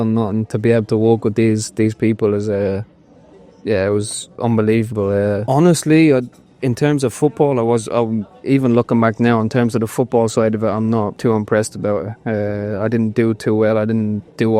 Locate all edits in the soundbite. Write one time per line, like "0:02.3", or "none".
0:05.4
0:11.2